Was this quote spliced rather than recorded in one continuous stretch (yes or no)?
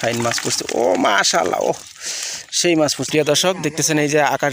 yes